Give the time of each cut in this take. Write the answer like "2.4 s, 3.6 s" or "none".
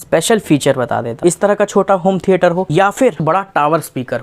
1.2 s, 3.2 s